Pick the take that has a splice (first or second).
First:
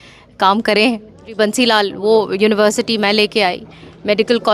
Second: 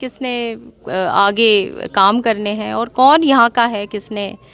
first